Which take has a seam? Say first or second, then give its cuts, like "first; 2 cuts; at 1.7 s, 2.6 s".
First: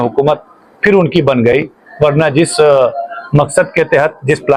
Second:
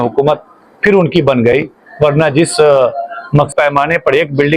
second; 1 cut; at 3.5 s